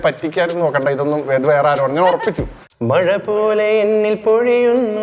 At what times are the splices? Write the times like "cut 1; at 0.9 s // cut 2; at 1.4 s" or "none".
cut 1; at 2.5 s